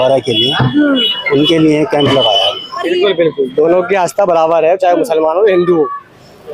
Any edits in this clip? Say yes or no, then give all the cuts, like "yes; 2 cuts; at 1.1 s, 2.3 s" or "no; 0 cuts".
yes; 1 cut; at 2.8 s